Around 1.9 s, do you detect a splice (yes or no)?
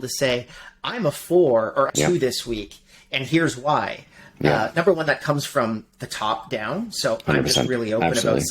yes